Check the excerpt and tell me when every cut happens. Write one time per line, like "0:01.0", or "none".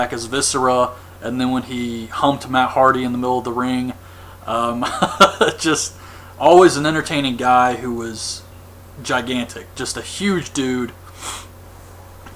0:06.1